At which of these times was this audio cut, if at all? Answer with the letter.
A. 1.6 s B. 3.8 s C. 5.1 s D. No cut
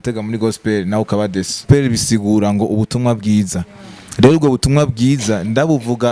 A